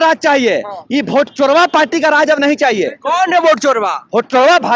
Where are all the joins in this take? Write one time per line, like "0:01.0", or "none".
none